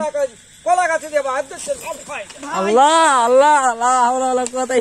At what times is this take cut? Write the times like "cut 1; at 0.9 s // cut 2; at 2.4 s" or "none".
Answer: none

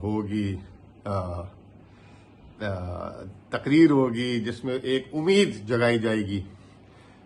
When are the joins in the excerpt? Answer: none

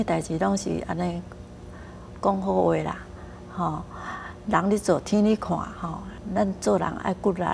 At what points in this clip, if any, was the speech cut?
cut 1; at 6.1 s

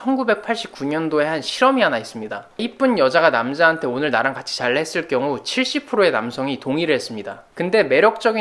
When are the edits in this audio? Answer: cut 1; at 2.6 s

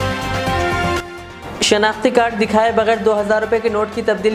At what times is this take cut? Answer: cut 1; at 1.0 s

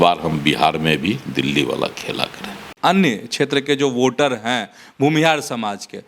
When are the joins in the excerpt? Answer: cut 1; at 2.7 s

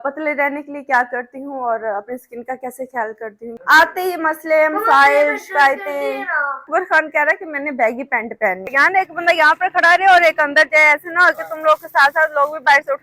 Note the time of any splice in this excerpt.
cut 1; at 3.5 s // cut 2; at 6.7 s // cut 3; at 8.7 s

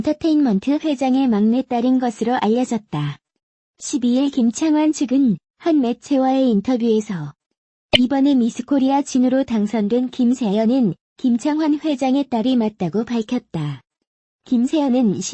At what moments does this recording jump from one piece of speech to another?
cut 1; at 1.0 s

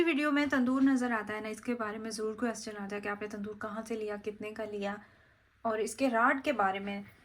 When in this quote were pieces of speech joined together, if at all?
none

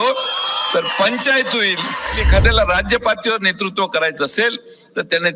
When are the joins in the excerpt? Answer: cut 1; at 2.2 s

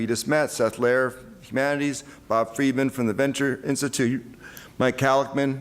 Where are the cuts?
cut 1; at 1.6 s

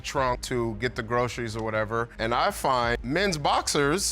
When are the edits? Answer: cut 1; at 3.0 s

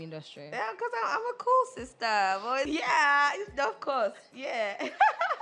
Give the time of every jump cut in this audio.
cut 1; at 2.7 s

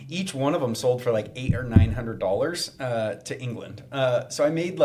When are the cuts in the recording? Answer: none

